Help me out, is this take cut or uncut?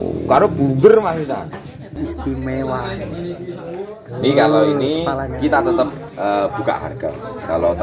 cut